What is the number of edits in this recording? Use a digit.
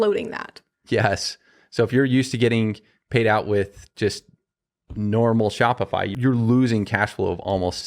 1